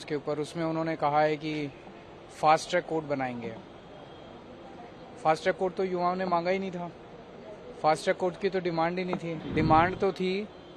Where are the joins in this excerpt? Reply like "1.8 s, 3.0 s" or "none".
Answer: 9.4 s